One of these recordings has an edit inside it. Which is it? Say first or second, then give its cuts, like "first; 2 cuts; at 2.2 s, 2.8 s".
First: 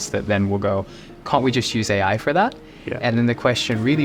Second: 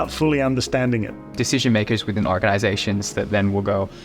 second; 1 cut; at 1.3 s